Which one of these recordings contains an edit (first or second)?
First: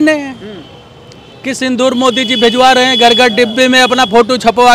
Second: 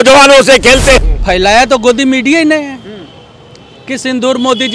second